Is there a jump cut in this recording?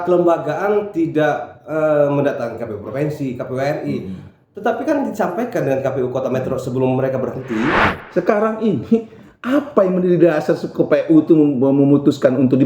yes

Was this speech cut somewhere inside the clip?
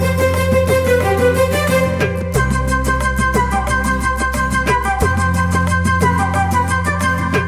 no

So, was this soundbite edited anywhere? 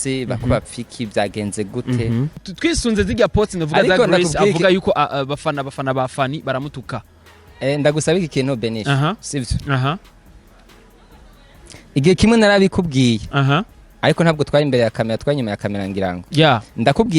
yes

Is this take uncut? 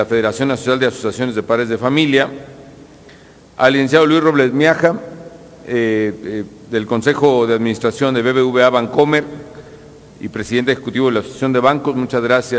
no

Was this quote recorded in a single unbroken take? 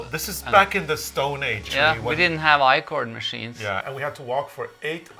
no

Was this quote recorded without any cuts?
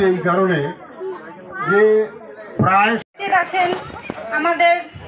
no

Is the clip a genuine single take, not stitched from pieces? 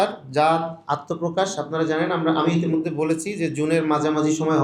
yes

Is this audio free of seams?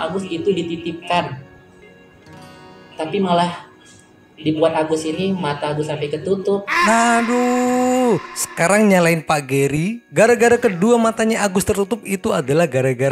yes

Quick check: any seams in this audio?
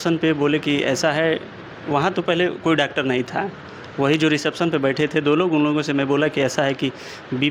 no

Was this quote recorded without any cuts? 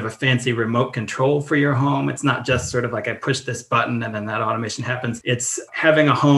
no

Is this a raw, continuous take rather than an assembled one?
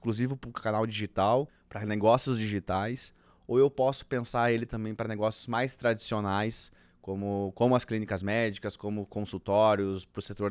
no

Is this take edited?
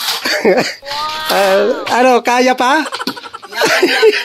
no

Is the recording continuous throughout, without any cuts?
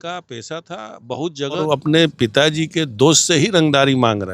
no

